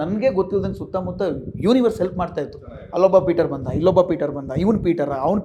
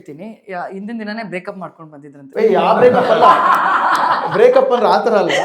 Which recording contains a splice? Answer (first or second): second